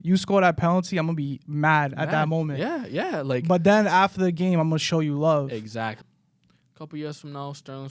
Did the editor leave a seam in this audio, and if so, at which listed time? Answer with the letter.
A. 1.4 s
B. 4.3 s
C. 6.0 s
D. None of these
C